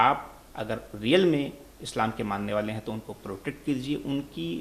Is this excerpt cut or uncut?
uncut